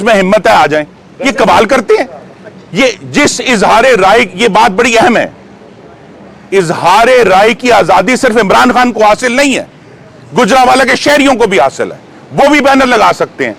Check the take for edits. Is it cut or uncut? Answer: uncut